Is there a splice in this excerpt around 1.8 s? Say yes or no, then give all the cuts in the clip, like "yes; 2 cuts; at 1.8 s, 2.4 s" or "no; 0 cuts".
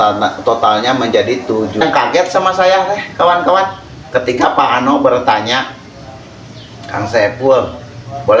yes; 1 cut; at 1.8 s